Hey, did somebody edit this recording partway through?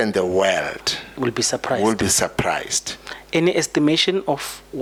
no; 0 cuts

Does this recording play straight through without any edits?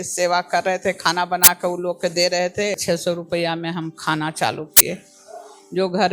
no; 1 cut; at 2.8 s

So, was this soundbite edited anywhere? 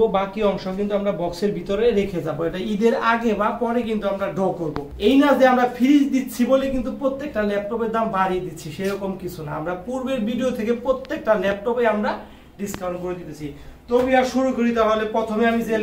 no; 0 cuts

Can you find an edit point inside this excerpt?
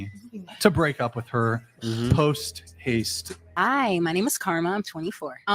yes; 1 cut; at 3.4 s

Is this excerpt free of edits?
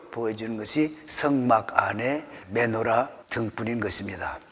no; 2 cuts; at 2.4 s, 3.2 s

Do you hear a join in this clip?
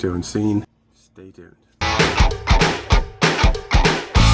yes; 1 cut; at 1.7 s

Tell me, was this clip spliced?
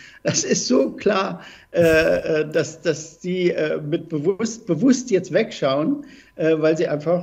no; 0 cuts

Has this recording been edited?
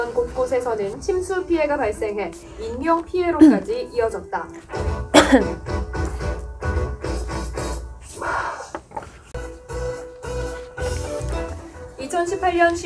yes; 1 cut; at 9.4 s

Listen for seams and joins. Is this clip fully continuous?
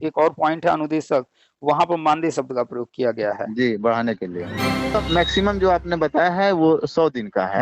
no; 1 cut; at 4.9 s

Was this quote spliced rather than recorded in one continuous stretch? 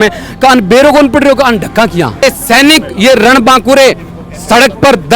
yes; 1 cut; at 2.2 s

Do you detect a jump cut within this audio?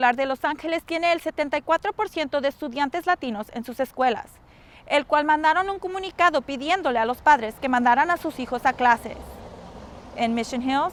no; 0 cuts

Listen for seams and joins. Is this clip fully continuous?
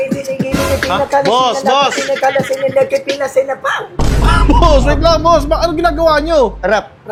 yes; 0 cuts

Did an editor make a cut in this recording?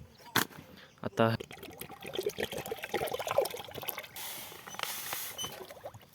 yes; 2 cuts; at 1.4 s, 4.1 s

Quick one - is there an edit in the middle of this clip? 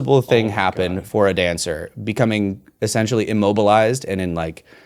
no; 0 cuts

